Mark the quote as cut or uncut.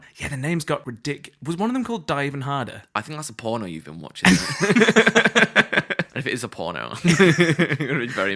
cut